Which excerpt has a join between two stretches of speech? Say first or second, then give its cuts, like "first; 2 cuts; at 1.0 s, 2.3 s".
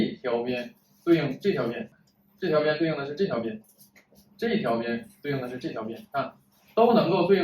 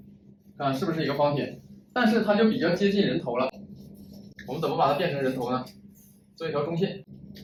first; 1 cut; at 1.9 s